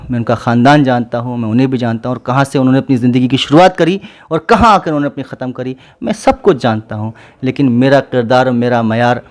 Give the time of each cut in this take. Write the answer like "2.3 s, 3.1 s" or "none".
none